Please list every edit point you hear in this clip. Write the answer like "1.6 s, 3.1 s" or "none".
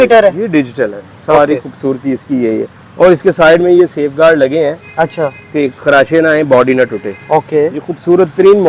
none

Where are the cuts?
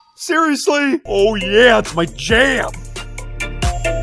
1.1 s

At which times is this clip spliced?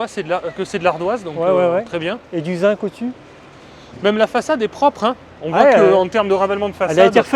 none

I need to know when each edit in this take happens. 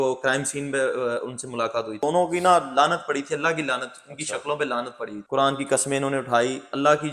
2.0 s, 5.2 s

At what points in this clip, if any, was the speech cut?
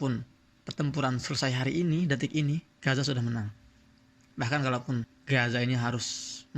none

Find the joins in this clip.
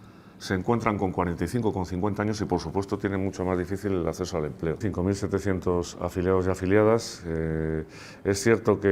4.8 s

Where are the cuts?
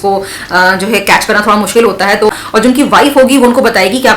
2.3 s

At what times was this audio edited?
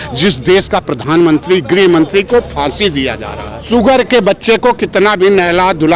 3.5 s

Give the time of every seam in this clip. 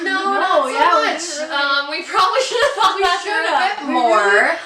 none

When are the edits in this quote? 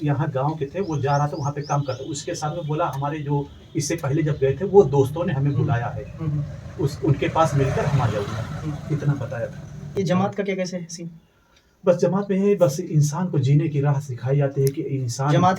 9.8 s

